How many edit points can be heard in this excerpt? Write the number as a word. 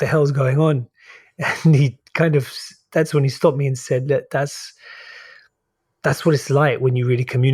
zero